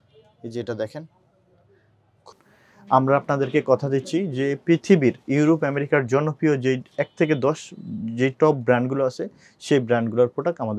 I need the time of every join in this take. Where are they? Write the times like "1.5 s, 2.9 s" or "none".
2.3 s

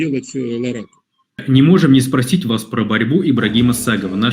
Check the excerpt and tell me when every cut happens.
1.4 s

